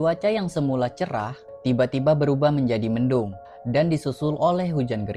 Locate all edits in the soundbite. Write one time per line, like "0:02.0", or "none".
none